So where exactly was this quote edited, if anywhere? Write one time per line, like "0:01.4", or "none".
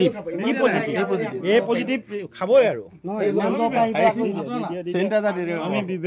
none